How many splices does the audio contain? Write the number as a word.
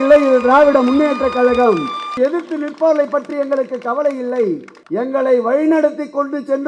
two